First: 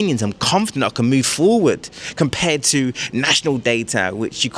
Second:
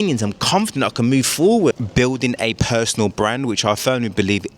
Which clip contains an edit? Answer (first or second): second